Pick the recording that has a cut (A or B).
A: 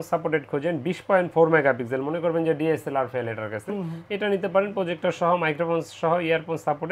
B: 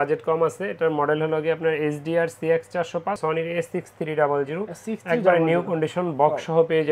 B